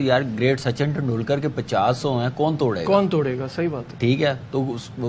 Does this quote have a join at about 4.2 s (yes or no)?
yes